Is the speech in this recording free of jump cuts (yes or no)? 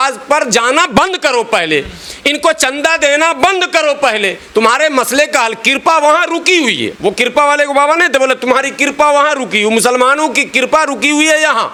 yes